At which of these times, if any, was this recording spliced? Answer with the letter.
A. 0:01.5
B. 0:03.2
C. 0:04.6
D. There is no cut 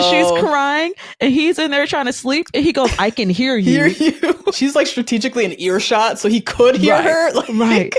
C